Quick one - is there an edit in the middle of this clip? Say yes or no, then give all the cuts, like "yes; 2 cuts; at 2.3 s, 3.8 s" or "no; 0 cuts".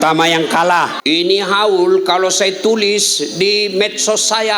yes; 1 cut; at 1.0 s